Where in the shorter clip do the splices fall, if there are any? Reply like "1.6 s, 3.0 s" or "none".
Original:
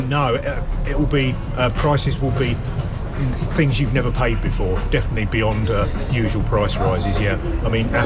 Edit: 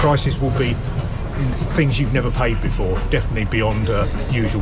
none